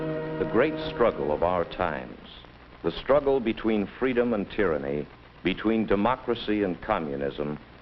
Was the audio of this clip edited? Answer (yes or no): no